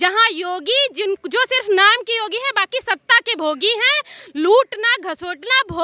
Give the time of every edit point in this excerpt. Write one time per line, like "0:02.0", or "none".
none

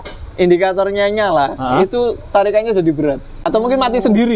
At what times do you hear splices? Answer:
0:03.5

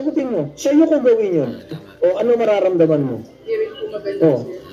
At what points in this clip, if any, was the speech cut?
0:01.8
0:03.3

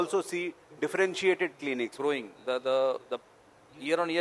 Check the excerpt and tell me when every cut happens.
0:02.0

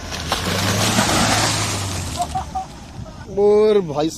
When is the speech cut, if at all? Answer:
0:03.2

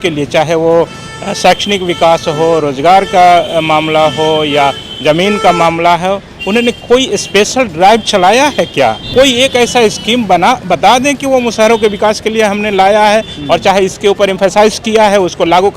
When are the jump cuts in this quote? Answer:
0:09.0

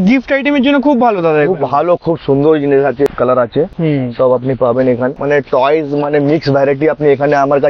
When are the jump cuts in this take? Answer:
0:03.1

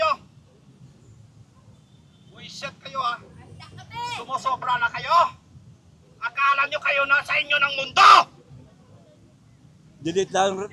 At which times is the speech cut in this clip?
none

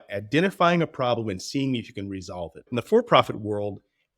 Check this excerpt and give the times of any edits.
0:02.7

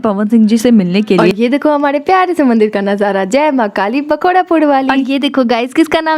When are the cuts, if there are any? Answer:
0:01.3
0:05.0

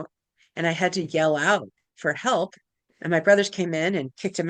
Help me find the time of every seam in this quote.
none

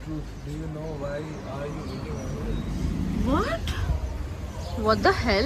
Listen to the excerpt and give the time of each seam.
none

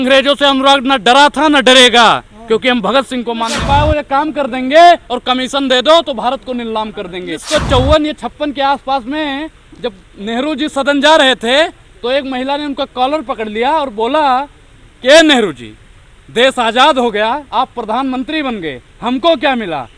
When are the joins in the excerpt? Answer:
0:03.5
0:07.4

